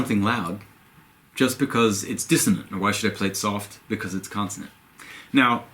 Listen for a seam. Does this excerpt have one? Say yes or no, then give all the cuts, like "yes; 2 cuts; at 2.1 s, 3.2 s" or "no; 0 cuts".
no; 0 cuts